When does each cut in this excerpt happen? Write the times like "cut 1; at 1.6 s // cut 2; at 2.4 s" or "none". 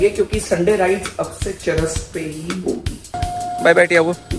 cut 1; at 3.2 s